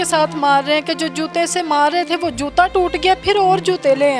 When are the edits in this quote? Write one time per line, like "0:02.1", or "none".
none